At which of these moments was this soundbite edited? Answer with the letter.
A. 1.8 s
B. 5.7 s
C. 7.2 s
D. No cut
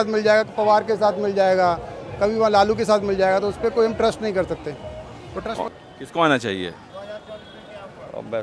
B